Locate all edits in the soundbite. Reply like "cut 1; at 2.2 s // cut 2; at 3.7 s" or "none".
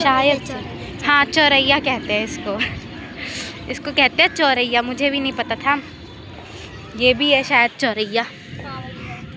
none